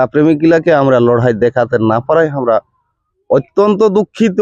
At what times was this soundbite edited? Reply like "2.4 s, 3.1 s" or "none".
none